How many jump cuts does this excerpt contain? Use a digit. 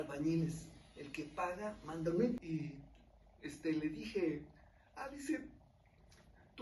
1